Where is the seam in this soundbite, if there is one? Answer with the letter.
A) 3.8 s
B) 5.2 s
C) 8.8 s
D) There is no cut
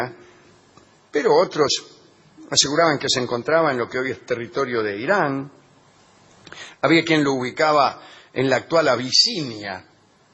C